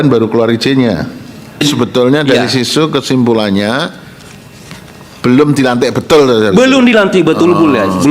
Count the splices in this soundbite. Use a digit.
1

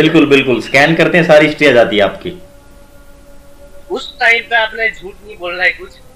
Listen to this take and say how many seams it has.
0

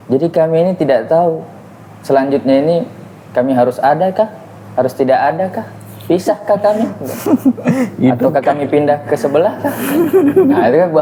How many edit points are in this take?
0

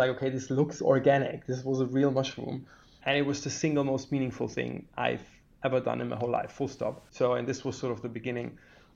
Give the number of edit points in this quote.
2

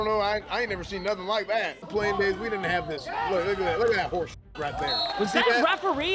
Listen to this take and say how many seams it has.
2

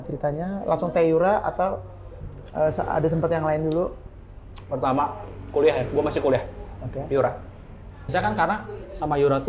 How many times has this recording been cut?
1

